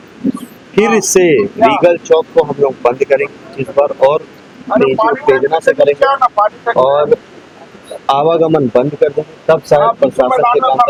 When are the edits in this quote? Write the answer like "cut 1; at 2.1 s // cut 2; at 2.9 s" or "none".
none